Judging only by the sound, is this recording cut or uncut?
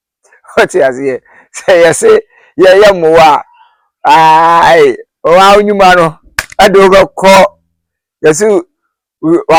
uncut